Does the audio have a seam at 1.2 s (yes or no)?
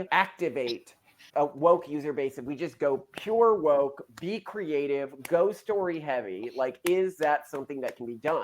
yes